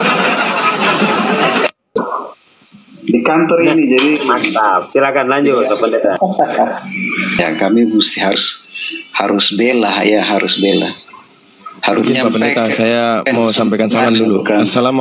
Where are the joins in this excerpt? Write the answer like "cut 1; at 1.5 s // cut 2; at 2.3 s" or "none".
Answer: cut 1; at 1.9 s // cut 2; at 7.4 s